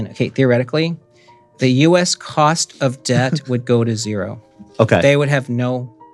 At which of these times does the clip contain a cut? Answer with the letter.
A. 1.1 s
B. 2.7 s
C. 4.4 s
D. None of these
D